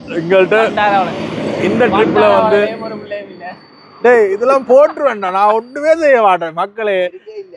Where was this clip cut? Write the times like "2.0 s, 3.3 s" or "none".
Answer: none